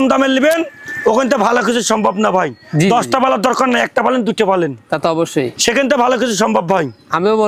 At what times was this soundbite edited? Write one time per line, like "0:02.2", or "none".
none